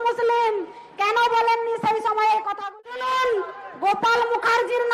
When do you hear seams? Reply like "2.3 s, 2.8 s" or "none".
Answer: 2.7 s